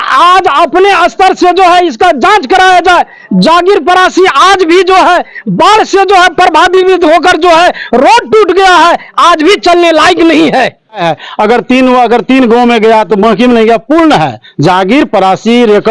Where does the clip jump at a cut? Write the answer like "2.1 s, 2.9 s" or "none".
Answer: 11.1 s